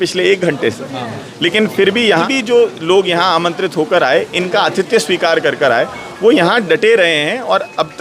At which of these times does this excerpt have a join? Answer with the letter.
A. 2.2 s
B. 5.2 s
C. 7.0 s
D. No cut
A